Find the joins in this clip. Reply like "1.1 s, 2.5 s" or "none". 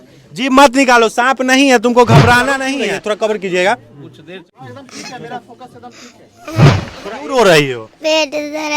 2.7 s, 6.7 s